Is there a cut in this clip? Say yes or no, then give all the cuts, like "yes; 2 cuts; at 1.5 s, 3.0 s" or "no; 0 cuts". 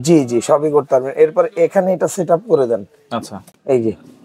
no; 0 cuts